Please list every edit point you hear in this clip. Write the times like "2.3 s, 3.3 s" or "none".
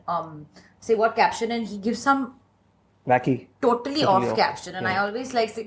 none

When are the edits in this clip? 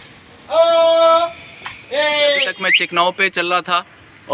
2.6 s

